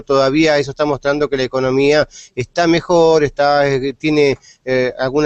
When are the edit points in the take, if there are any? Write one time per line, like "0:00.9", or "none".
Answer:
0:01.7